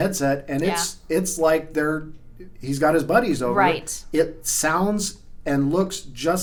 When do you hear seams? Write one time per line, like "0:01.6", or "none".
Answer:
none